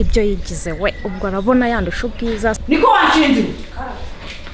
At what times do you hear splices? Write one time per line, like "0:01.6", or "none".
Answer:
0:02.6